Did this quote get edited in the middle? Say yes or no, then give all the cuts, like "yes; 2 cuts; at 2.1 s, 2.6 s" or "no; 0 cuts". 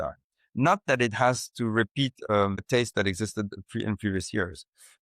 yes; 1 cut; at 2.6 s